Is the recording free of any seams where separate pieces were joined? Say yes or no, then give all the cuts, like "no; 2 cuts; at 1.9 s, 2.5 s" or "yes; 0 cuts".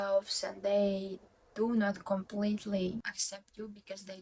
no; 1 cut; at 3.2 s